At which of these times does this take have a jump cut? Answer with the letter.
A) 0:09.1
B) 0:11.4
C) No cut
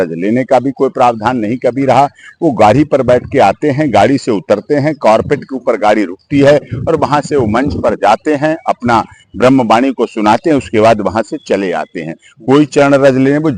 C